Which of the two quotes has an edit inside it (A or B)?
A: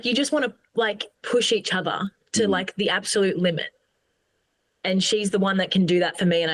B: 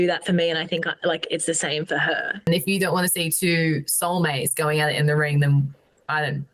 B